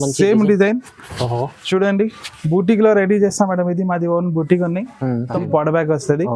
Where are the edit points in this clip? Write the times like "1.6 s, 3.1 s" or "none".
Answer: 5.3 s